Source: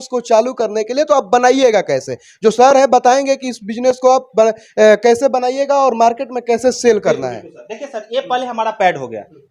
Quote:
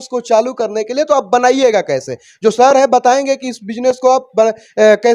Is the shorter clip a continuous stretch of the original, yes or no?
yes